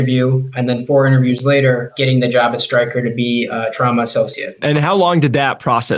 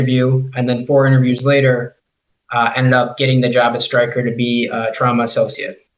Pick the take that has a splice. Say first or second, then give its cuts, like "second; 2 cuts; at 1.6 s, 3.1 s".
first; 2 cuts; at 1.9 s, 4.6 s